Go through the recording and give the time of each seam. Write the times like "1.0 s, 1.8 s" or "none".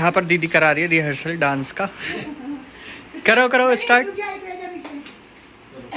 none